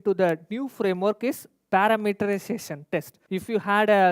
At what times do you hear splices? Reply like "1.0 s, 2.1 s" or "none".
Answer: 3.2 s